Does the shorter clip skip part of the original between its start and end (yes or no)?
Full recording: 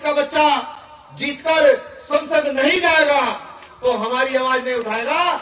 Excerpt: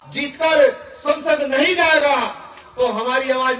no